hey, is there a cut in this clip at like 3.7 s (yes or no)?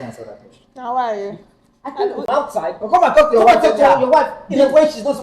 no